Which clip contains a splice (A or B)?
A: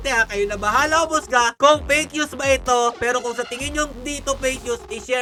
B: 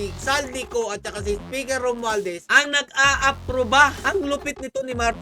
B